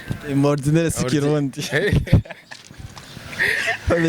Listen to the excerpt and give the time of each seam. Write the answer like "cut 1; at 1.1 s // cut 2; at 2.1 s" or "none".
none